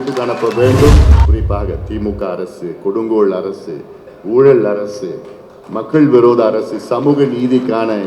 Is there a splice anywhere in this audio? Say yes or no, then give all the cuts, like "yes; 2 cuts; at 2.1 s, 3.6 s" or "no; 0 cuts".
yes; 1 cut; at 1.2 s